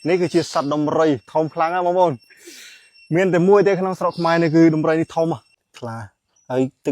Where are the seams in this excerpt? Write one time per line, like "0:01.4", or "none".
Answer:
0:05.5

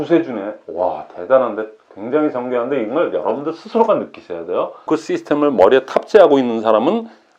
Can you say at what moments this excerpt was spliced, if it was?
0:04.8

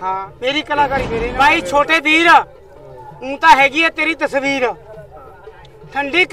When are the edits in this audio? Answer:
0:01.3

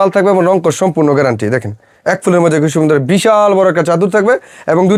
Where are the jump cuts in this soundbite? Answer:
none

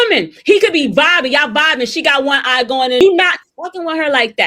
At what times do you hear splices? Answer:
0:03.0

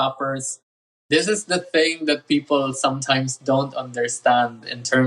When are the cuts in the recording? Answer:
0:01.0

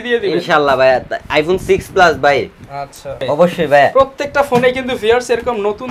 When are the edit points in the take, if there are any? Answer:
0:03.2

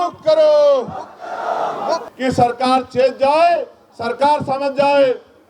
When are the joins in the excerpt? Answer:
0:02.1

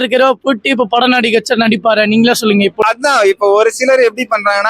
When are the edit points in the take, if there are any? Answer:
0:02.8

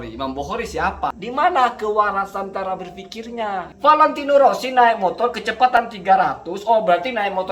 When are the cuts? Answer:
0:01.1
0:03.7

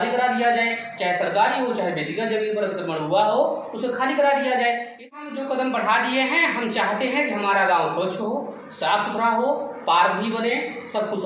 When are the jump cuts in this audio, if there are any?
0:05.1

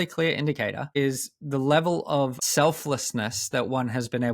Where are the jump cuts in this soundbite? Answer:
0:00.8
0:02.4

